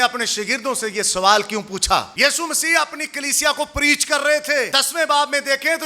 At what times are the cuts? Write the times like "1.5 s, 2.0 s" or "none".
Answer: 2.1 s, 4.7 s